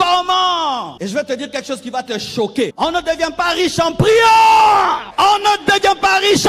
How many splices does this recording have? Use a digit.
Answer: 3